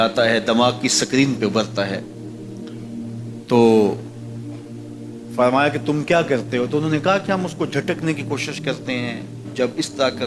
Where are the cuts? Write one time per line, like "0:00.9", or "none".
0:04.0
0:05.4